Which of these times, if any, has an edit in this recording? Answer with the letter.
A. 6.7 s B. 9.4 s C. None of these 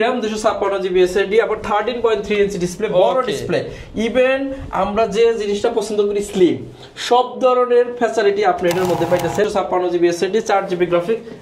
B